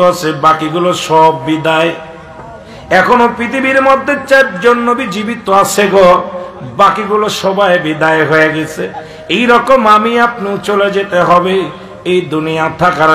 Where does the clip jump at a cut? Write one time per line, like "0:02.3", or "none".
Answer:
none